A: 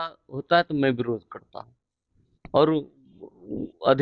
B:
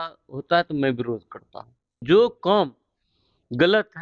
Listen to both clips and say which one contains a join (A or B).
B